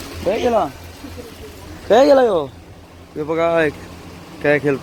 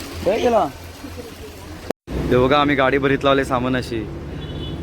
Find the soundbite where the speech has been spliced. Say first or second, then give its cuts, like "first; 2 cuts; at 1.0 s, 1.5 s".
second; 1 cut; at 1.9 s